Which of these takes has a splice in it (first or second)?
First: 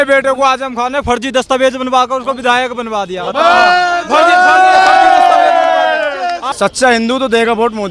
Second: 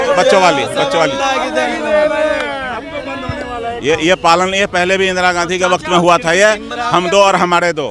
first